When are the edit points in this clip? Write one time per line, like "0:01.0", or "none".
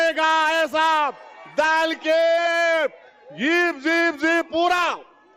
none